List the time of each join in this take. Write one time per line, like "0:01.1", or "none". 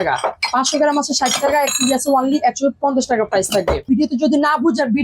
0:03.8